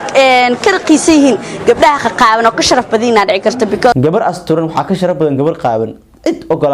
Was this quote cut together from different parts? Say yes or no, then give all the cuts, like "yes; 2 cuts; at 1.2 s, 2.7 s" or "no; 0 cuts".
yes; 1 cut; at 3.9 s